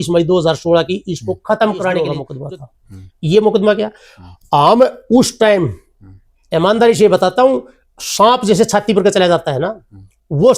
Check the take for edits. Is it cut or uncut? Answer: uncut